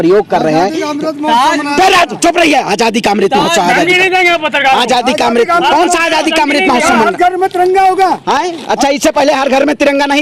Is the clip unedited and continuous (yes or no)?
yes